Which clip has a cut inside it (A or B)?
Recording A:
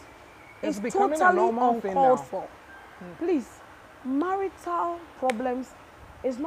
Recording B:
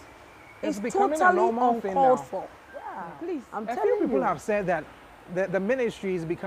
B